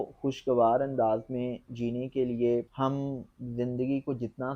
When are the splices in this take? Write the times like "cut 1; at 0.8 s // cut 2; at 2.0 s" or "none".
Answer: cut 1; at 2.7 s